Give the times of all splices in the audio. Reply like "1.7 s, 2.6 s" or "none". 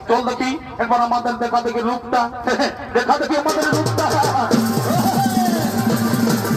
none